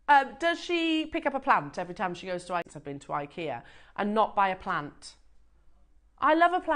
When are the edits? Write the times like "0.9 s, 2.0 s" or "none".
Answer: 2.7 s